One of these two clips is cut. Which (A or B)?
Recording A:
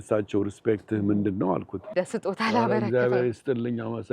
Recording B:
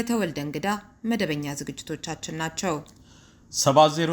A